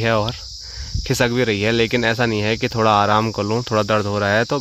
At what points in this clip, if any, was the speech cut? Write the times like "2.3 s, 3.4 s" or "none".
none